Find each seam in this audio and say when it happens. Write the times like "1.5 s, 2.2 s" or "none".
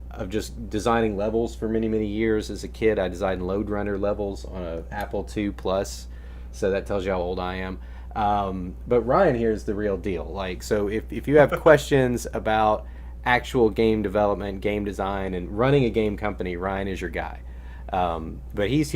15.0 s